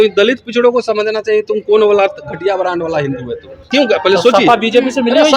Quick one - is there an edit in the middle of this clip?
yes; 1 cut; at 3.5 s

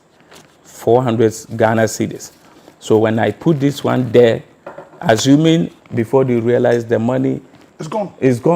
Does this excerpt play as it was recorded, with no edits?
no; 1 cut; at 5.8 s

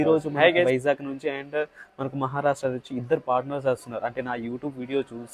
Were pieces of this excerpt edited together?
no; 0 cuts

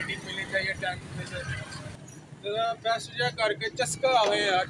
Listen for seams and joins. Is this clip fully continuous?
no; 1 cut; at 1.9 s

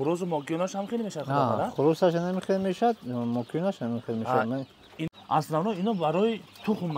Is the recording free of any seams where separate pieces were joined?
no; 1 cut; at 5.0 s

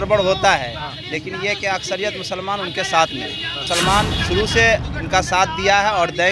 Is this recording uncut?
no; 1 cut; at 3.6 s

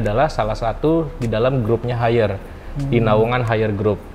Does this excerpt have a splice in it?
no; 0 cuts

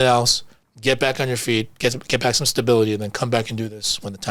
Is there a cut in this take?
no; 0 cuts

